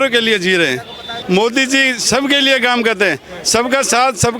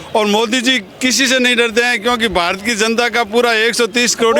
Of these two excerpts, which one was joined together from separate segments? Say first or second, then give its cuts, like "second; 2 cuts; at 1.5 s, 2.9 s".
first; 1 cut; at 1.1 s